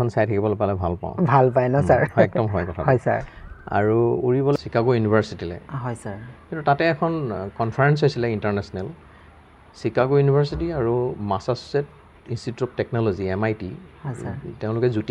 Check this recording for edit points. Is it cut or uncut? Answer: cut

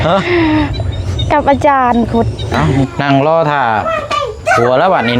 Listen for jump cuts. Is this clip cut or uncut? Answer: cut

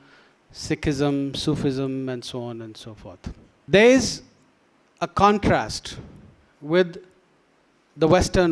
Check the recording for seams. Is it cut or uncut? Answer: cut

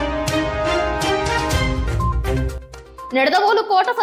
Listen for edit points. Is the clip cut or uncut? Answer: uncut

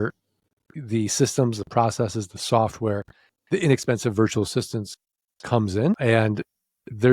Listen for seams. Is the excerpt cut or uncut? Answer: cut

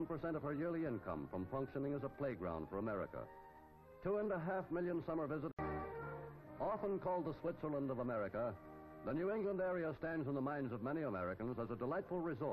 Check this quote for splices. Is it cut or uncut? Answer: uncut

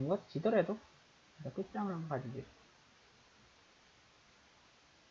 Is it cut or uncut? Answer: cut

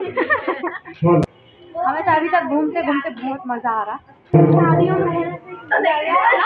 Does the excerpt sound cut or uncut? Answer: cut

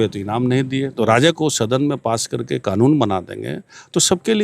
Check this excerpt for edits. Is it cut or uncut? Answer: cut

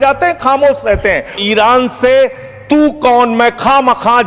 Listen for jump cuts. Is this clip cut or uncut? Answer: cut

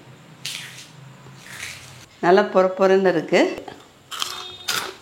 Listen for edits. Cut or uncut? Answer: cut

